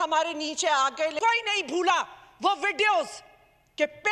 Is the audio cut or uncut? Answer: cut